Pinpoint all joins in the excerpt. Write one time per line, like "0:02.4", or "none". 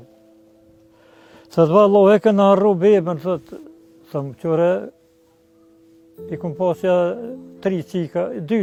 none